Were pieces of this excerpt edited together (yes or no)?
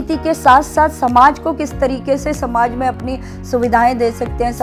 no